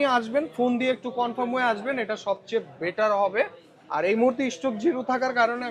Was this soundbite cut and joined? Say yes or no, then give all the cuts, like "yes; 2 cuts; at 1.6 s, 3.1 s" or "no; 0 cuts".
no; 0 cuts